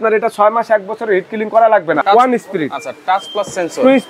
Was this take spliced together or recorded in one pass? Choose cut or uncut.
cut